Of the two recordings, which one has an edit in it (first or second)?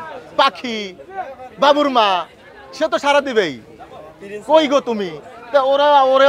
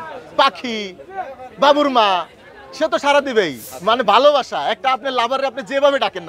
second